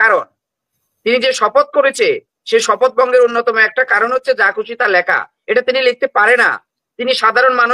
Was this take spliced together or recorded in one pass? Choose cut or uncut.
uncut